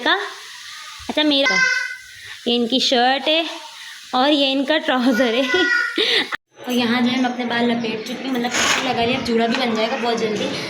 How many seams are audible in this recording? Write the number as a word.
two